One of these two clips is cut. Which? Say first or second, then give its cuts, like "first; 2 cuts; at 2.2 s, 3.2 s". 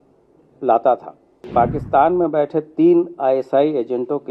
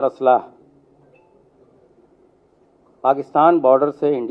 first; 1 cut; at 1.5 s